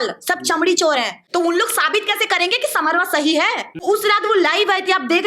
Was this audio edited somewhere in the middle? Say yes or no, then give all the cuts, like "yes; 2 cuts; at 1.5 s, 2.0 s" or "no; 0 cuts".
yes; 2 cuts; at 1.2 s, 3.7 s